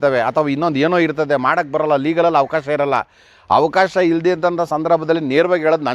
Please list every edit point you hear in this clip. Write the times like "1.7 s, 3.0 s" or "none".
none